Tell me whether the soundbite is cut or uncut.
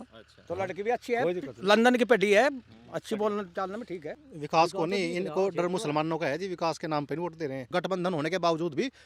cut